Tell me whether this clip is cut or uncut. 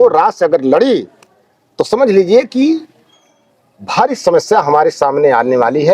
uncut